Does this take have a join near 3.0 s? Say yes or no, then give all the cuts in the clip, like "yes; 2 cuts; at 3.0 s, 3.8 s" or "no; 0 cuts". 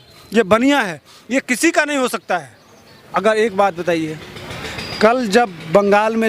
yes; 1 cut; at 3.0 s